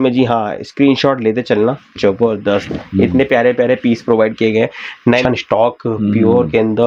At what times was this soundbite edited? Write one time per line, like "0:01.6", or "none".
0:05.2